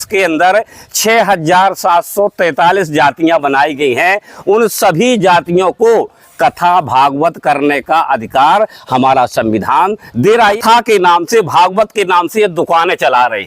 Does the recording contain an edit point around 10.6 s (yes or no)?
yes